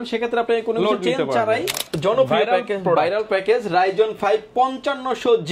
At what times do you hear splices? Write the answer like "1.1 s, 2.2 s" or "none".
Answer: 1.8 s